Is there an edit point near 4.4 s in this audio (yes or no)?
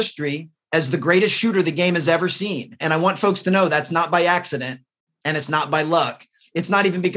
no